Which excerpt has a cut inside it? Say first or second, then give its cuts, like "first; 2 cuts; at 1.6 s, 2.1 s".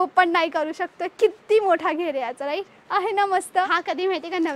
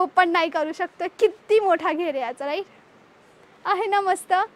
first; 2 cuts; at 2.8 s, 3.7 s